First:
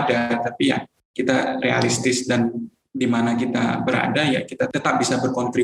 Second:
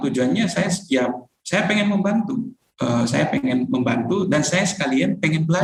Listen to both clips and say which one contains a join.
first; 3 cuts; at 0.9 s, 2.8 s, 4.7 s

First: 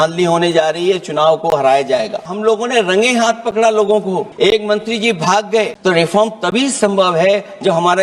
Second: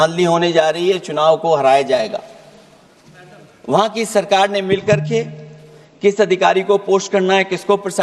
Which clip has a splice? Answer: first; 3 cuts; at 2.3 s, 4.3 s, 5.7 s

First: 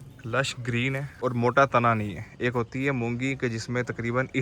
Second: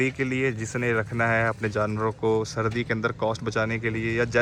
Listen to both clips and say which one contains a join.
first; 1 cut; at 1.2 s

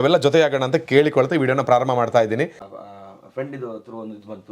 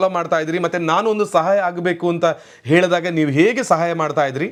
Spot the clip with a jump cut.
first; 1 cut; at 2.6 s

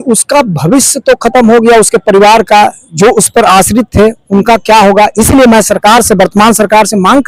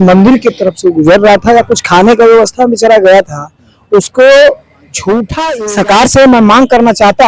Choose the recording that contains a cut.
second; 1 cut; at 5.3 s

